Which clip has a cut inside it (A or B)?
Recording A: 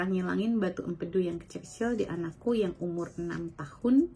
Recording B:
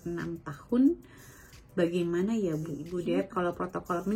B